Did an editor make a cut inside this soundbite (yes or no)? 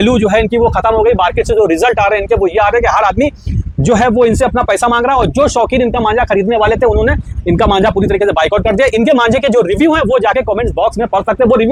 no